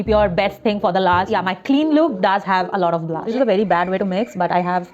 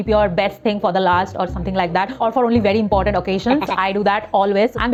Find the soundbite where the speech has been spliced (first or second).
first